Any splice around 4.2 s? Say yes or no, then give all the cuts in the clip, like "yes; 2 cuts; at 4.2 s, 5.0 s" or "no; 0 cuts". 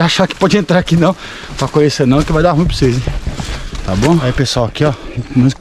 yes; 1 cut; at 4.2 s